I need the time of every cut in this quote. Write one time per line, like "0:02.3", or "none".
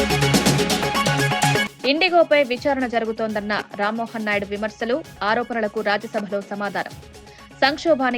0:01.6